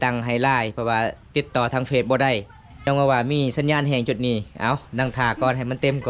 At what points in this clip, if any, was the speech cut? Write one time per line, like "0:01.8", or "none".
0:02.8